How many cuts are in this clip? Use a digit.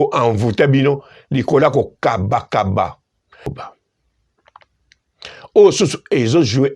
1